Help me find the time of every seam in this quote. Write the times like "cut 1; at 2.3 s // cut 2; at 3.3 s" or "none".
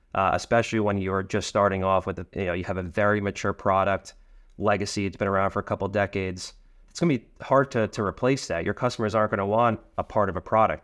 cut 1; at 6.8 s

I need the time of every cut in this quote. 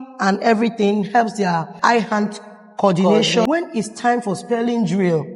cut 1; at 1.8 s // cut 2; at 3.5 s

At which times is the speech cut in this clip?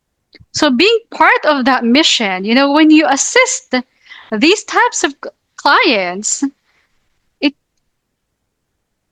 none

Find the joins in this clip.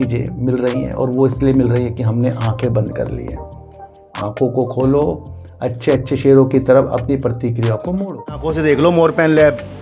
cut 1; at 8.5 s

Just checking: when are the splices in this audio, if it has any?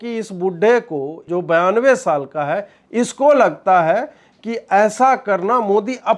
cut 1; at 1.2 s

